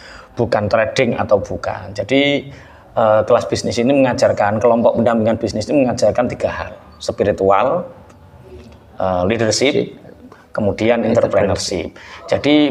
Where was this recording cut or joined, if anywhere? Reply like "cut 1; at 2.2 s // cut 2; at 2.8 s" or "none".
none